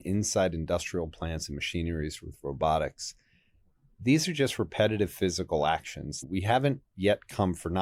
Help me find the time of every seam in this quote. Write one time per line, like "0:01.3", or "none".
0:06.2